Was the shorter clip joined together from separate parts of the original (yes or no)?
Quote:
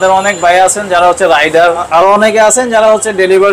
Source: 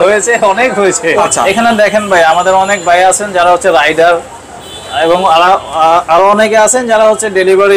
yes